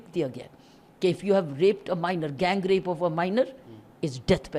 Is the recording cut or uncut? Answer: uncut